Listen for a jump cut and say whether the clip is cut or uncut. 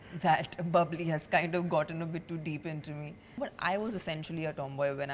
cut